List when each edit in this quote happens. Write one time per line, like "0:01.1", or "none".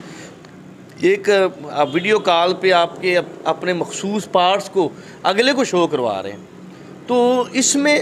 none